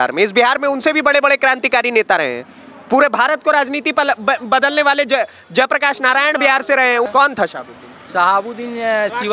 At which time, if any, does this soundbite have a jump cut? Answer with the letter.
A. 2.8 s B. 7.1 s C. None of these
B